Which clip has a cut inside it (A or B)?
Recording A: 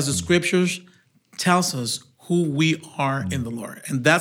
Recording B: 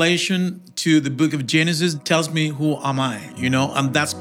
B